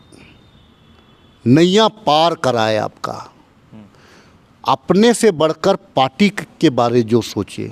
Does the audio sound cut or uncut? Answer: uncut